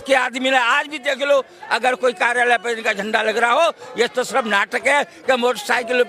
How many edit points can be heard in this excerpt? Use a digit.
0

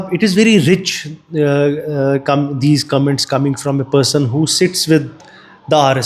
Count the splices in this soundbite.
0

